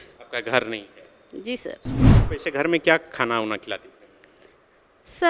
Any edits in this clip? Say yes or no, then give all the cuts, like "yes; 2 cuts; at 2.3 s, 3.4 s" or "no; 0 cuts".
yes; 1 cut; at 2.1 s